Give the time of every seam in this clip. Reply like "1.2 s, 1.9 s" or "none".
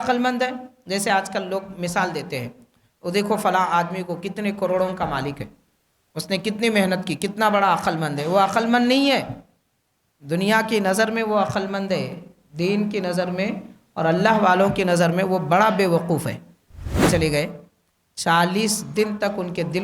17.0 s